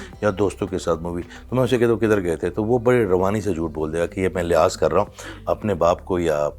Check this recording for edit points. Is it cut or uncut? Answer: uncut